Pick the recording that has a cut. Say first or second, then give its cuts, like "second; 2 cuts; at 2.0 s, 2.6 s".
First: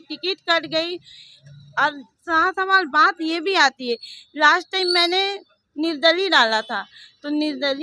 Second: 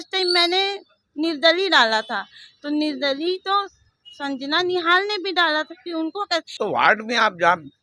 second; 1 cut; at 6.5 s